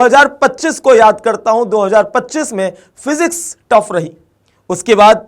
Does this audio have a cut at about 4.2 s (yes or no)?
no